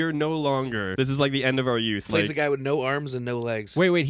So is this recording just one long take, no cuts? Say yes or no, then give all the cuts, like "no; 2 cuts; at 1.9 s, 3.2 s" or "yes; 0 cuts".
no; 2 cuts; at 0.9 s, 2.0 s